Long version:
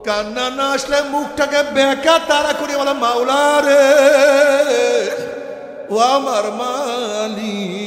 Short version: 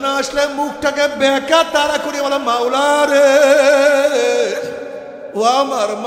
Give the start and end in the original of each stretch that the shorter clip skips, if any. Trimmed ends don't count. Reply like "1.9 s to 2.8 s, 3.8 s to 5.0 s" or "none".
none

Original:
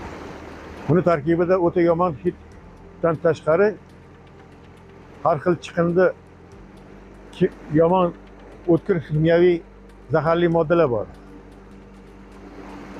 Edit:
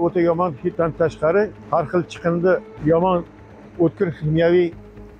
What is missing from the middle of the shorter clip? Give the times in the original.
2.3 s to 3.0 s, 3.8 s to 5.1 s, 6.3 s to 7.6 s

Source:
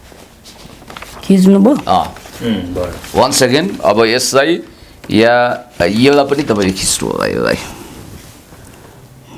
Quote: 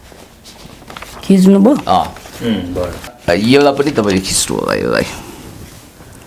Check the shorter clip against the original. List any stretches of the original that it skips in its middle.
3.1 s to 5.6 s

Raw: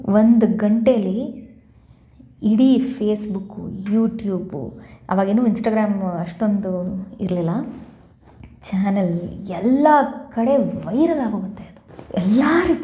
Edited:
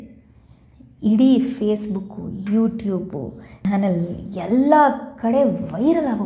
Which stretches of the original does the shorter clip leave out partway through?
5.0 s to 8.8 s

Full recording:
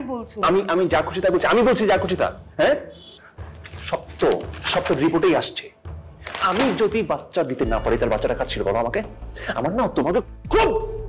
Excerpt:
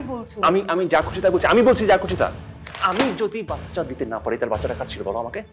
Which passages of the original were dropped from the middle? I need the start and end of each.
2.4 s to 6.0 s

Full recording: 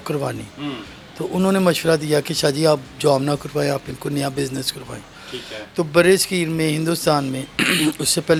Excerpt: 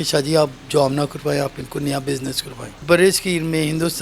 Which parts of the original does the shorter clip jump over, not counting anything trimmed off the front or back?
5.1 s to 5.9 s

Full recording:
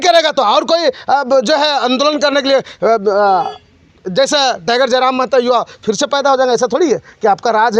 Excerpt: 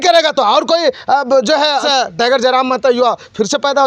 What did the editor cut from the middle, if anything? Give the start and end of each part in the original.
1.8 s to 4.3 s

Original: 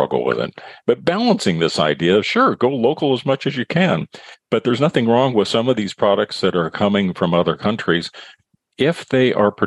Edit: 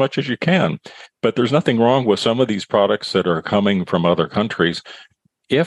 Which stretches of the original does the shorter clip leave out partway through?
none

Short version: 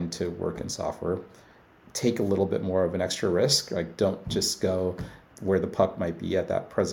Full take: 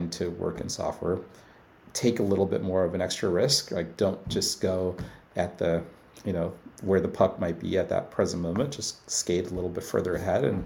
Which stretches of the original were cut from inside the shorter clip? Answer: 5.2 s to 6.6 s

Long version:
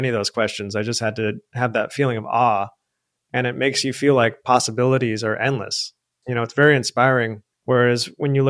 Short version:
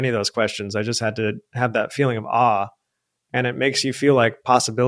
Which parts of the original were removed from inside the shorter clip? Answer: none

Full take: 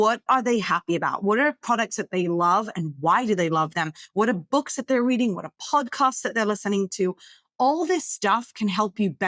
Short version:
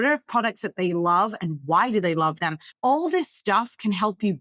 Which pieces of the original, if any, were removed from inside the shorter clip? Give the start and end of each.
3.9 s to 7.4 s

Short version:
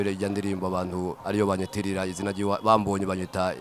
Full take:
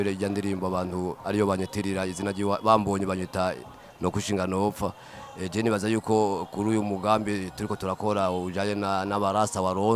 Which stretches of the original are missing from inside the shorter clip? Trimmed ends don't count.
none

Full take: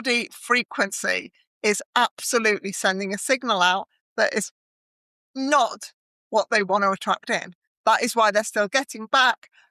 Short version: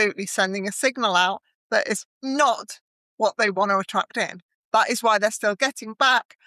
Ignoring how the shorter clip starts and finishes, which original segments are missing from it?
4.6 s to 5.2 s

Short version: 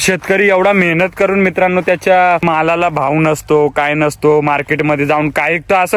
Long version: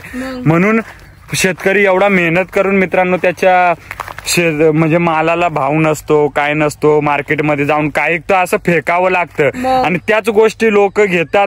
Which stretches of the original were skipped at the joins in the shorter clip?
3.8 s to 5.0 s

